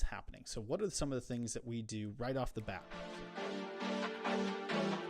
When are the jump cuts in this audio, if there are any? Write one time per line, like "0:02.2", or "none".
0:02.9